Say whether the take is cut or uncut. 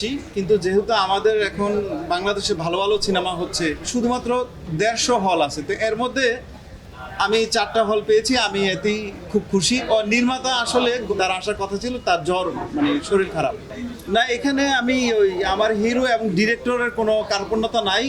cut